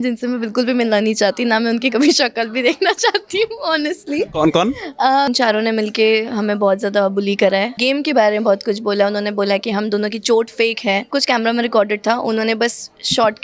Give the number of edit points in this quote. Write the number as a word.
three